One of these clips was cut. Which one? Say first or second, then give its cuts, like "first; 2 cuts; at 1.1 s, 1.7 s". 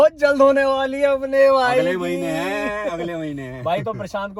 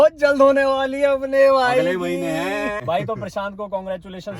second; 1 cut; at 2.8 s